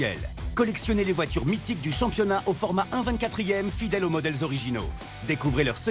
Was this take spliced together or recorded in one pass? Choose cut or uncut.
uncut